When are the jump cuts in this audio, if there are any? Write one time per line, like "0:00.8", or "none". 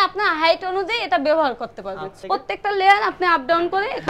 0:02.1